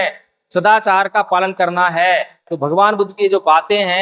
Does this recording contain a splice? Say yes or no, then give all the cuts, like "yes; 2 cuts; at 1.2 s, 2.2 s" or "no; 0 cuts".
yes; 1 cut; at 2.4 s